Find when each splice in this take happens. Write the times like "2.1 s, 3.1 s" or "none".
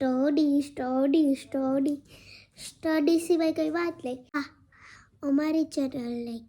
4.4 s